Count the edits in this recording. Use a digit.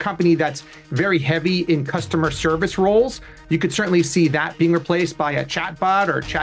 0